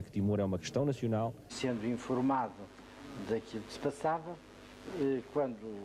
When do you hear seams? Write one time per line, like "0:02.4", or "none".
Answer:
0:01.5